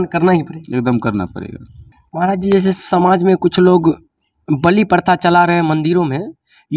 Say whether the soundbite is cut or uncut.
cut